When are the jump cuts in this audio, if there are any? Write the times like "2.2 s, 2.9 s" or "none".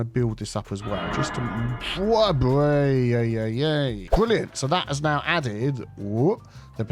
4.0 s